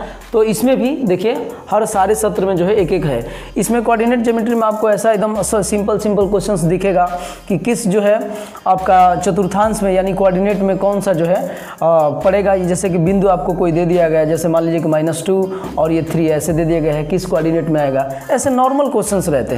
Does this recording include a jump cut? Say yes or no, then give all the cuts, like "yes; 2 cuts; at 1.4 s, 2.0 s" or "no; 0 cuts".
no; 0 cuts